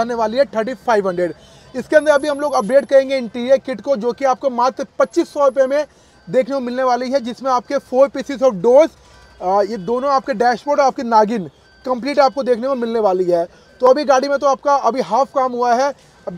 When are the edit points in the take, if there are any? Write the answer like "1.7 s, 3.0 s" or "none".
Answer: none